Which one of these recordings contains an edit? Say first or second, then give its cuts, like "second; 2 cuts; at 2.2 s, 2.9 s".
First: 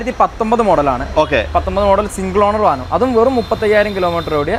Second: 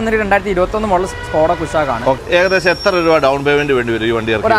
second; 1 cut; at 2.2 s